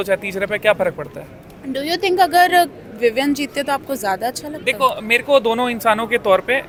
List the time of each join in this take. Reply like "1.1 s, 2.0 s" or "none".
none